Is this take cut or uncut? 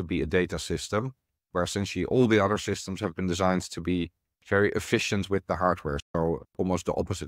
uncut